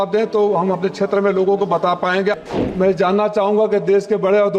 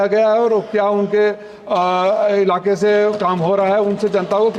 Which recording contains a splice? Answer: first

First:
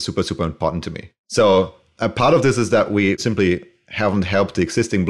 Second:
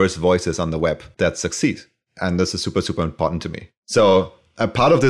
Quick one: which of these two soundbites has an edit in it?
second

